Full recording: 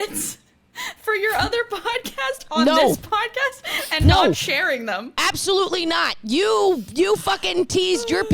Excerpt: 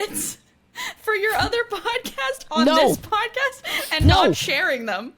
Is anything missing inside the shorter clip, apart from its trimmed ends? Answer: no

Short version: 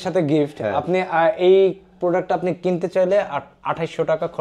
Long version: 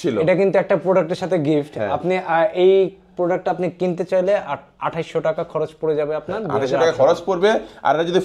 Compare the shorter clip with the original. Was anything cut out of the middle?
no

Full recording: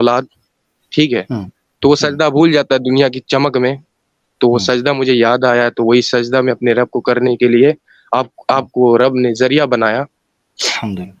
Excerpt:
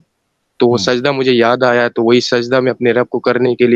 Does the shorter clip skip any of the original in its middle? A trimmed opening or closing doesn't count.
no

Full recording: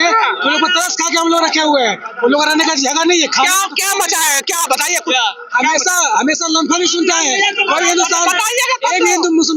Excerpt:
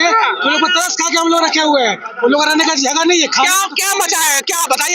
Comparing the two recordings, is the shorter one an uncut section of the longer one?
yes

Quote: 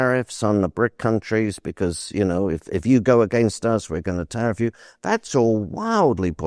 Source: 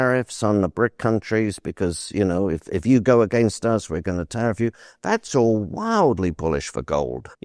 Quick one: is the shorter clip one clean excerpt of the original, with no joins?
yes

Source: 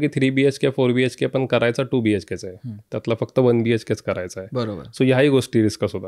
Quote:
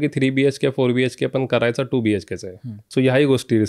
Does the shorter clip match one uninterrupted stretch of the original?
no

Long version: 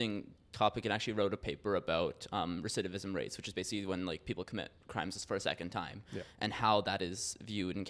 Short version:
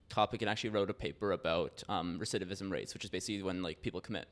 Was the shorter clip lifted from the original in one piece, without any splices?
yes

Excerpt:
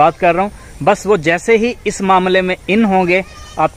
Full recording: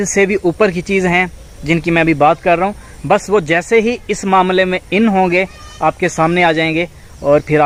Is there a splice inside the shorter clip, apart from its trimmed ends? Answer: no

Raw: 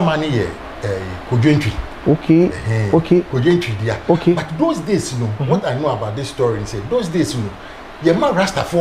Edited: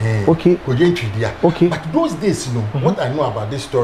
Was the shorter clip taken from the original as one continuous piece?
yes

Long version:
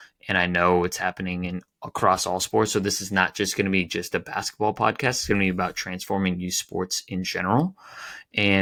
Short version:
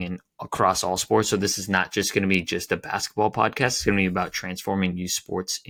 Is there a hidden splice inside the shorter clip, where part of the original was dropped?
no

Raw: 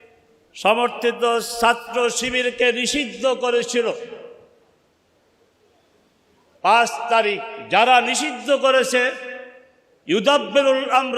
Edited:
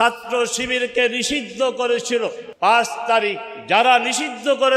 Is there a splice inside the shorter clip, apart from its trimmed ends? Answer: yes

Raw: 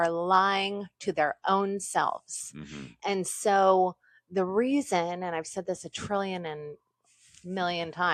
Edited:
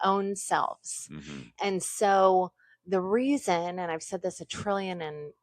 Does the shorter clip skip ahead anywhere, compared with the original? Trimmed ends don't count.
no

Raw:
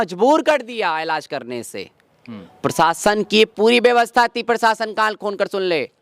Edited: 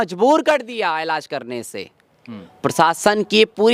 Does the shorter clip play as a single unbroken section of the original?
yes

